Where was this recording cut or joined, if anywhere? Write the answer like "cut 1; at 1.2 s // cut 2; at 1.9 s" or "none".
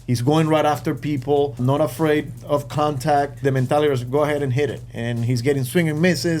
cut 1; at 1.6 s // cut 2; at 3.4 s